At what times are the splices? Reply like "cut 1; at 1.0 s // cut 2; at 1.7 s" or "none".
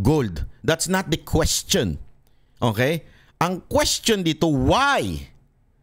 none